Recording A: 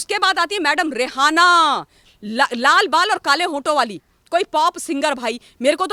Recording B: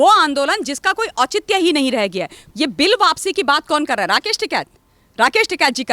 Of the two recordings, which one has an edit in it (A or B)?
B